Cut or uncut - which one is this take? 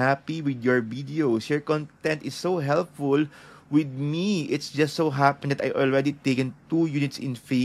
uncut